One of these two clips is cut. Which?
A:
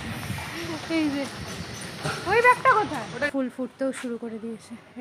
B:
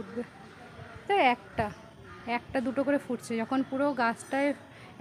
A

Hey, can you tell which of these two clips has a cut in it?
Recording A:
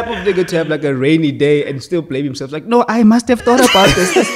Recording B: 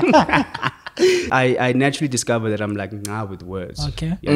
B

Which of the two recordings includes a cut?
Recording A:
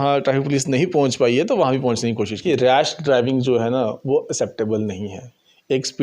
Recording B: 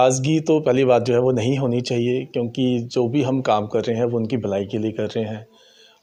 A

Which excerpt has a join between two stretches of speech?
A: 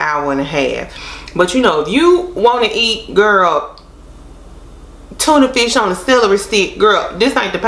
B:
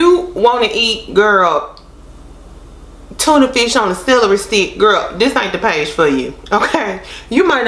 A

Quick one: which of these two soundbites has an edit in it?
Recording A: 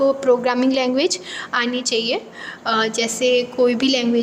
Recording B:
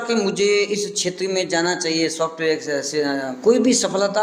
B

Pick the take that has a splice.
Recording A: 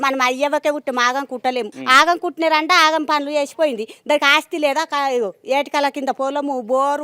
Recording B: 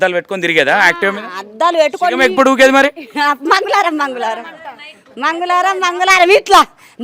A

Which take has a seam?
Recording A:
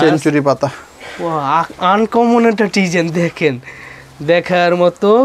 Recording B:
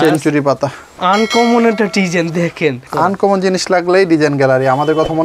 B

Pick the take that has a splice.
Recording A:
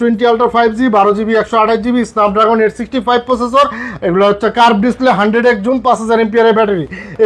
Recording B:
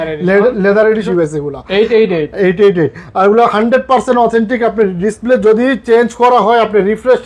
B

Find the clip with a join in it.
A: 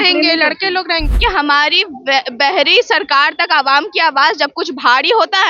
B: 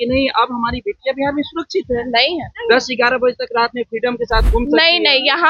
A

